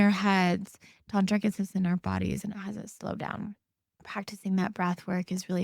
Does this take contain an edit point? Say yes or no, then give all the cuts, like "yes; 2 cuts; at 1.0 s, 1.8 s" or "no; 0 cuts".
yes; 1 cut; at 4.1 s